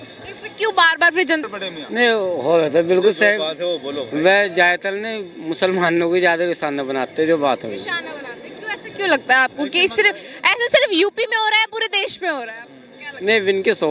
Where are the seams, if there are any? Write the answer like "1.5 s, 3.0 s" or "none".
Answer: 1.4 s